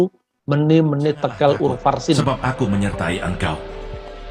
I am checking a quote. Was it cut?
yes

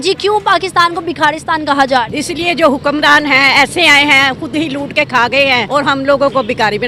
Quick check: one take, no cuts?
no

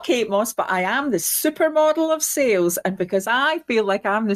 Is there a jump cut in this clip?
no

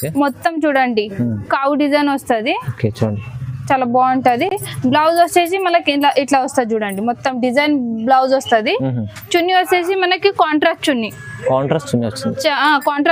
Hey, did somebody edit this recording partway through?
no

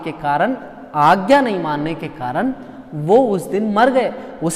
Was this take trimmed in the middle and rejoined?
no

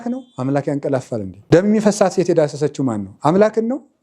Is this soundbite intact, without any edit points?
no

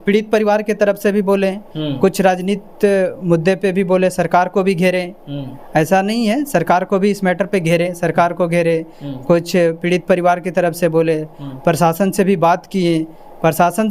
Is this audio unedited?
yes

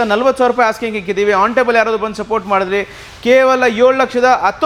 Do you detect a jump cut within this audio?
no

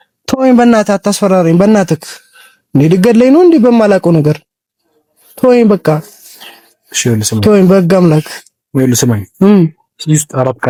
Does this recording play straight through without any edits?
yes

